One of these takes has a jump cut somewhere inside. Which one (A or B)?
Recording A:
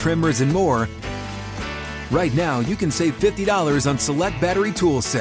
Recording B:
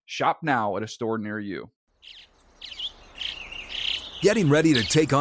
B